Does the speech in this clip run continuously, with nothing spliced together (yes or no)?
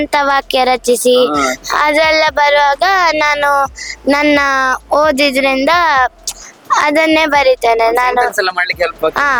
yes